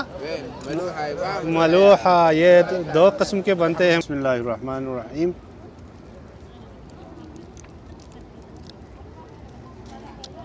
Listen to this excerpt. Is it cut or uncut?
cut